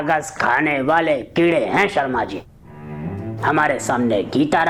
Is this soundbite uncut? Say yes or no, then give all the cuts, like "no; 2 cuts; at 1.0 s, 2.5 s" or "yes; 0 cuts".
yes; 0 cuts